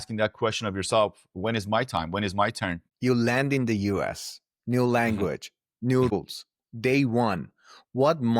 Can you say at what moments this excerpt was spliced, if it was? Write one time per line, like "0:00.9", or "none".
0:02.8
0:06.1